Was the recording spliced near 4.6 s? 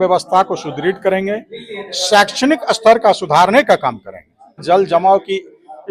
yes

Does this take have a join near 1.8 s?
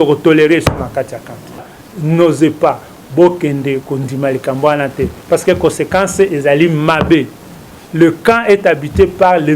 yes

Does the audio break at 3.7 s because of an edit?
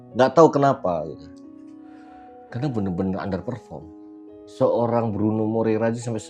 no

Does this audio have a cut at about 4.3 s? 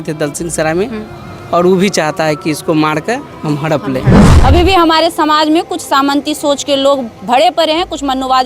yes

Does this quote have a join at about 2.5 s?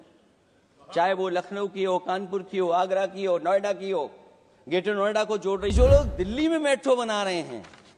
no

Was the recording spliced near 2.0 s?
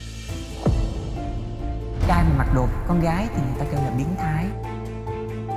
no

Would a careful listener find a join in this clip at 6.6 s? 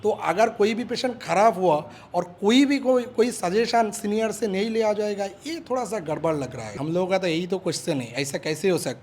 yes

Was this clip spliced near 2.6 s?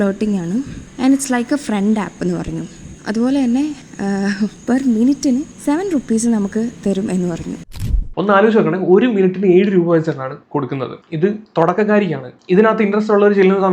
no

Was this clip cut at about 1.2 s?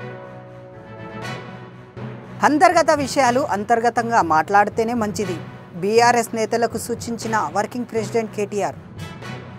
yes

